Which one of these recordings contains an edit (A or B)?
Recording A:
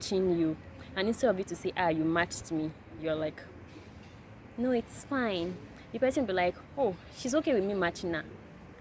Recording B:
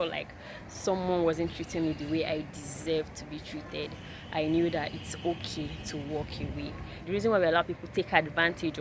B